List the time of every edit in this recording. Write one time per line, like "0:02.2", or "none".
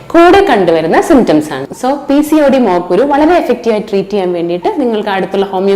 0:01.6